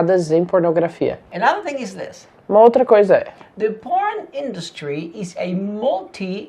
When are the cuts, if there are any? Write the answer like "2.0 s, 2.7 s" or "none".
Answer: 1.3 s